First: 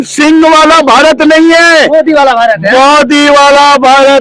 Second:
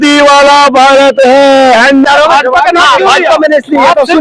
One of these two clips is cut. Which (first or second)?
second